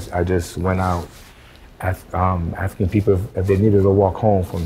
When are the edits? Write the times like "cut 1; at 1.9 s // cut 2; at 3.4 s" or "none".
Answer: none